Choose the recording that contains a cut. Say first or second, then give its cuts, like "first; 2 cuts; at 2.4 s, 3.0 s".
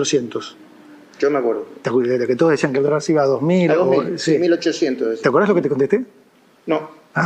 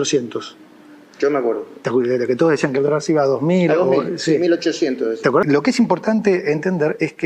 second; 1 cut; at 5.4 s